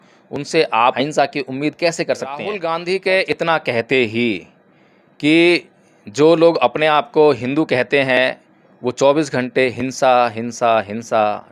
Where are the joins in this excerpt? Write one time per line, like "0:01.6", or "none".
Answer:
0:01.0
0:02.5